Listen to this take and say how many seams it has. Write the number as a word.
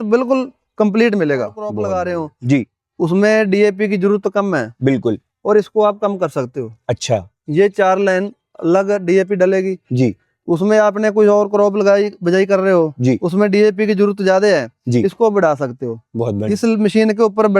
one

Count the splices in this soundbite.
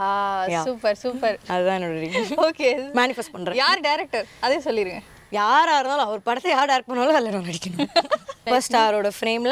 one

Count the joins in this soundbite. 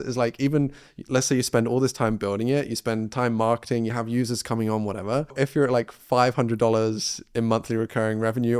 one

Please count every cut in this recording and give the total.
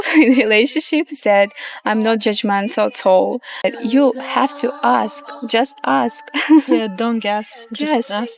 one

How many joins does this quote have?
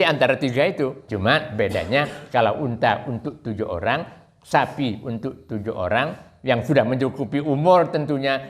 one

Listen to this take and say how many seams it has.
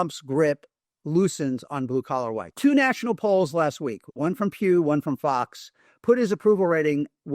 one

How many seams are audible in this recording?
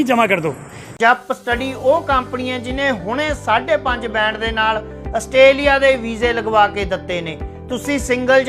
one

